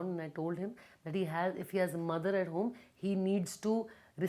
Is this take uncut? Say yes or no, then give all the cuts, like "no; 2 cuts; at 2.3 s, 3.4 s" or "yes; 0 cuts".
yes; 0 cuts